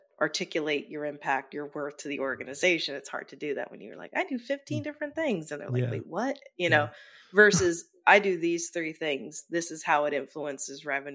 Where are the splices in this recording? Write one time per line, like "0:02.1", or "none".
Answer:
none